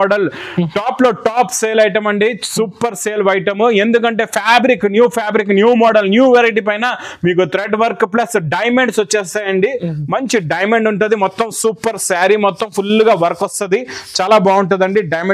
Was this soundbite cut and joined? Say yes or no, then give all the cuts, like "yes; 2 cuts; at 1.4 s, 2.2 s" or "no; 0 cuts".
no; 0 cuts